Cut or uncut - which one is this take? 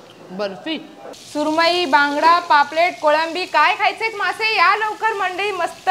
cut